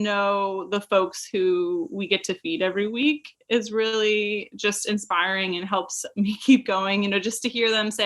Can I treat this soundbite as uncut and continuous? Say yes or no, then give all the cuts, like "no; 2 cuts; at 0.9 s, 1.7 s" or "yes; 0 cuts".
yes; 0 cuts